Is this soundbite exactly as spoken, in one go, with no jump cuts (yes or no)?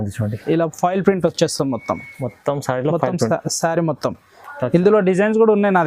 yes